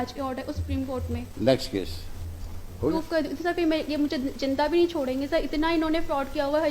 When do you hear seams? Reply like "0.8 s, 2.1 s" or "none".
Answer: 2.9 s